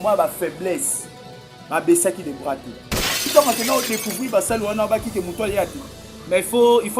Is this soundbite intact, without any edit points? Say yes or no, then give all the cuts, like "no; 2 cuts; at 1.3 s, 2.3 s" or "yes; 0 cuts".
no; 1 cut; at 3.3 s